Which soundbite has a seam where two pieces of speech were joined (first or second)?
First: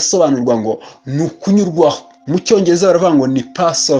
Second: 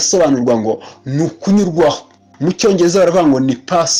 first